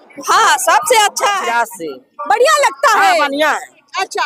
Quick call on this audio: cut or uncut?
cut